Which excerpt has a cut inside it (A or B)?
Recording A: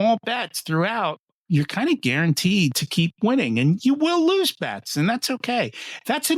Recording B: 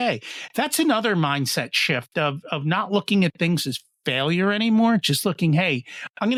A